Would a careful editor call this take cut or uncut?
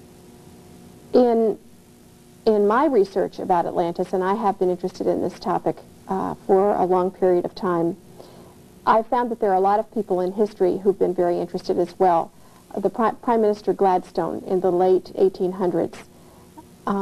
cut